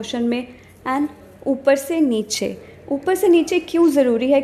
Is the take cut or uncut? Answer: uncut